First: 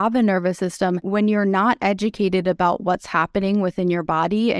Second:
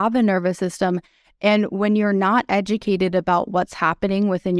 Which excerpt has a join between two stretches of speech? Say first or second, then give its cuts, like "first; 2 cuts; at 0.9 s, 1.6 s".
first; 1 cut; at 1.0 s